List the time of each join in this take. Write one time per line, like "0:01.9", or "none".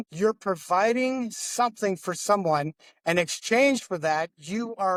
none